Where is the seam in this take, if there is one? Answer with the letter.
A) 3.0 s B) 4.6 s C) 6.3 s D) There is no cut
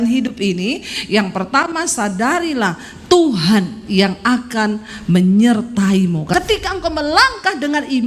C